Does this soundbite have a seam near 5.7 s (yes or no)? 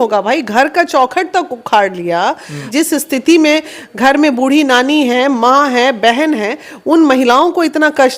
no